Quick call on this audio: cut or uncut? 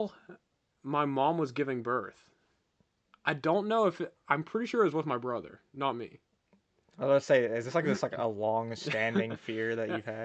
uncut